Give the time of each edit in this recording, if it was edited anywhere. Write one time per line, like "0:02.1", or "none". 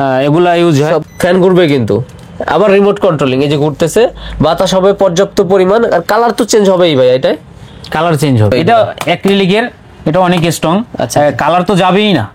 0:01.0
0:08.5